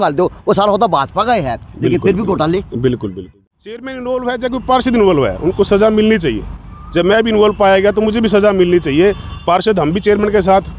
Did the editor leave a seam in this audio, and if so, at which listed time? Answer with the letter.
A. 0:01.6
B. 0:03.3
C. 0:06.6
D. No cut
B